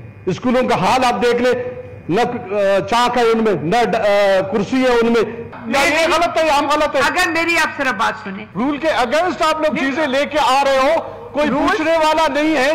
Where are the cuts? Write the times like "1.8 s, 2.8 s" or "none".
5.5 s, 8.4 s